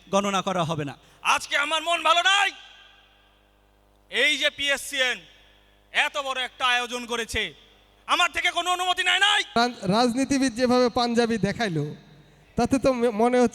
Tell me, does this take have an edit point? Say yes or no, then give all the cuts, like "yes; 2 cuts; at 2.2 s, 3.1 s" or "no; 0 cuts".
yes; 2 cuts; at 1.1 s, 9.5 s